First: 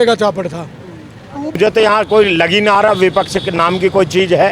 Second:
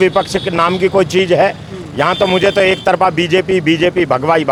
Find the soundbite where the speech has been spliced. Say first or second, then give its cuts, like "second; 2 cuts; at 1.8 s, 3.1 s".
first; 1 cut; at 1.6 s